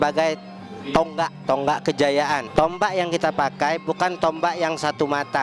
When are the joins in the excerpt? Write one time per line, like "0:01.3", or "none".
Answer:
0:01.4
0:02.5